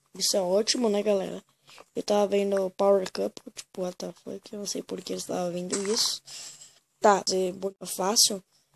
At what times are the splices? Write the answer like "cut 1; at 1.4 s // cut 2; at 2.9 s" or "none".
cut 1; at 7.7 s